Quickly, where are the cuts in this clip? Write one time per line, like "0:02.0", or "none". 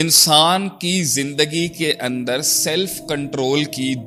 none

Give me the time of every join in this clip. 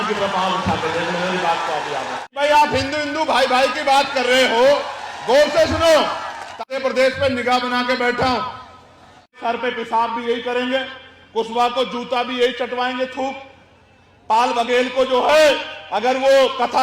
0:02.2
0:06.6
0:09.4

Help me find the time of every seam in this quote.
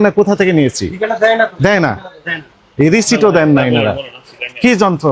none

